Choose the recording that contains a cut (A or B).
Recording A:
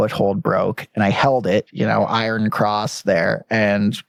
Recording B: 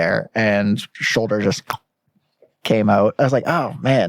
B